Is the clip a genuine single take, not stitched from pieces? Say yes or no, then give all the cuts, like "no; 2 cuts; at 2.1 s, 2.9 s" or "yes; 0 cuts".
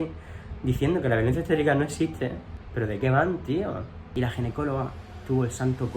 no; 1 cut; at 4.0 s